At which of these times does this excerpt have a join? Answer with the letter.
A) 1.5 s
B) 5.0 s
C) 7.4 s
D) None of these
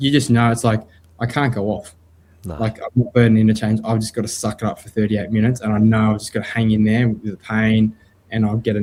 D